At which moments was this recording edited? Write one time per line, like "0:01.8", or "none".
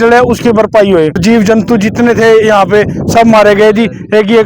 0:01.2